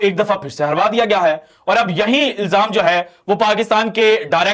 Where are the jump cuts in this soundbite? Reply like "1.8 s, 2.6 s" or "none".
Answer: none